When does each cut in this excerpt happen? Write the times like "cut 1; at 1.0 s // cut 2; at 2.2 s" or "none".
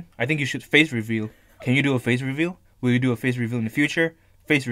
none